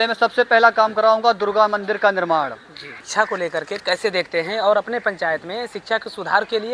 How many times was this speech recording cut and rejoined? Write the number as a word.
one